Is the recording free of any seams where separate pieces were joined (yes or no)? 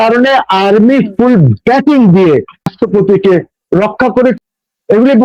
no